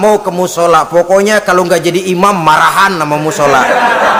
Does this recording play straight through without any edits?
yes; 0 cuts

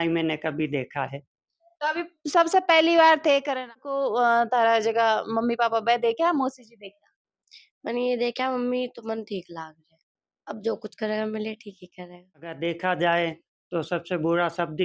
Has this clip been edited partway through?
yes; 2 cuts; at 3.9 s, 12.5 s

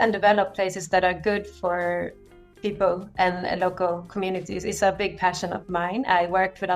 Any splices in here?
no; 0 cuts

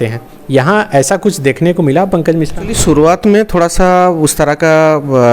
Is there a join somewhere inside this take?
yes; 1 cut; at 2.8 s

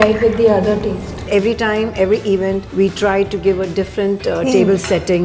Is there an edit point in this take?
yes; 2 cuts; at 1.2 s, 2.7 s

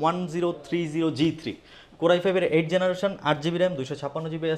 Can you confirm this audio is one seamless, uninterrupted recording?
yes; 0 cuts

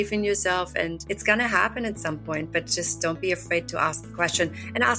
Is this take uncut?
yes; 0 cuts

